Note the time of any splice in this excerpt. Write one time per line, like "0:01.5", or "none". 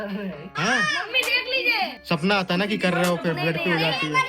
0:02.0